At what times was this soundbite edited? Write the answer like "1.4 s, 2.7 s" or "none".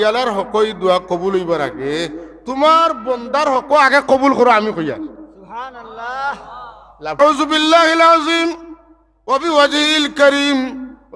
7.2 s